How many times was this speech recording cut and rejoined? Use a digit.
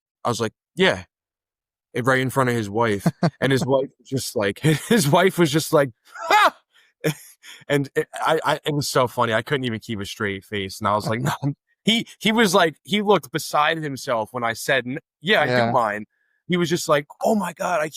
0